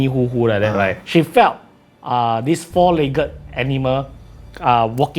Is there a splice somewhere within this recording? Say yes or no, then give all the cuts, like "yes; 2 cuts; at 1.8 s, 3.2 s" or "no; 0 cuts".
yes; 1 cut; at 1.0 s